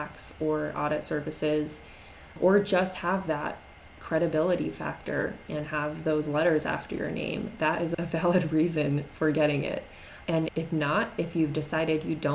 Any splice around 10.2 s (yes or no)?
yes